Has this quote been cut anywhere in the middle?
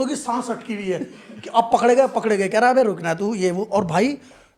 no; 0 cuts

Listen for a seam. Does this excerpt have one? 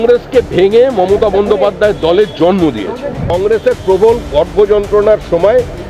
yes; 1 cut; at 3.3 s

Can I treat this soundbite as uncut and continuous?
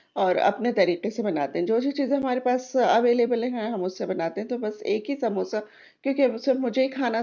yes; 0 cuts

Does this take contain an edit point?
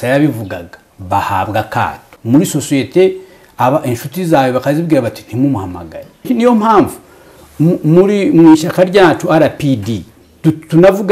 yes; 2 cuts; at 2.1 s, 6.3 s

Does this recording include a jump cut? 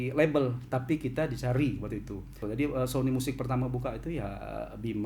yes; 1 cut; at 2.4 s

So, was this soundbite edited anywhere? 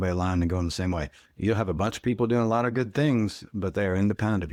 no; 0 cuts

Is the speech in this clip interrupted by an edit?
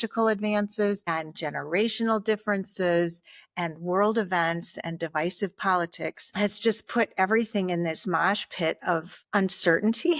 no; 0 cuts

